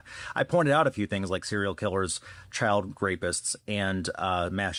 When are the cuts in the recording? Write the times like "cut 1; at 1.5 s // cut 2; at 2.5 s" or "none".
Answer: none